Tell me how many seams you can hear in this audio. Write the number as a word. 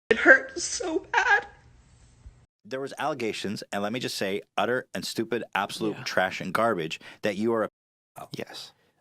one